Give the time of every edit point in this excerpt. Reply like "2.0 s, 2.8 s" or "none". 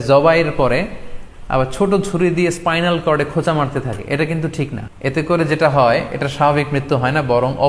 4.8 s